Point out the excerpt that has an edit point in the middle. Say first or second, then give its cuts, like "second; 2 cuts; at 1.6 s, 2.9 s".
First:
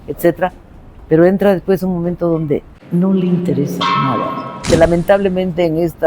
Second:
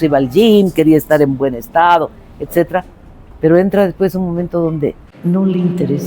first; 1 cut; at 4.7 s